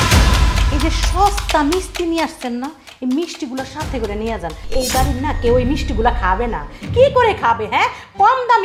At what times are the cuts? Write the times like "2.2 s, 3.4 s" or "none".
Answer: none